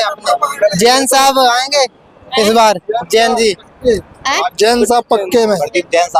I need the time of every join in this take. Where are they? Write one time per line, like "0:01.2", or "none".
none